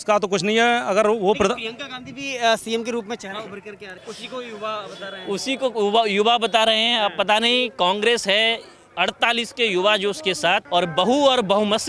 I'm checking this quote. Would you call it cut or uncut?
uncut